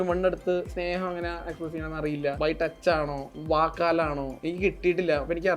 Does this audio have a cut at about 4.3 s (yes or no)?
yes